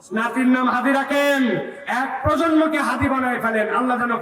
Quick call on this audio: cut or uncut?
uncut